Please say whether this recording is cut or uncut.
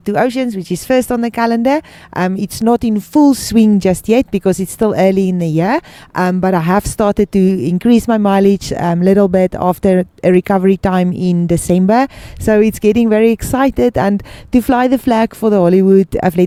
uncut